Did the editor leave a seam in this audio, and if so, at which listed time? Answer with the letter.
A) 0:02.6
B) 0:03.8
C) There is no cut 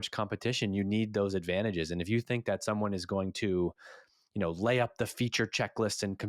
C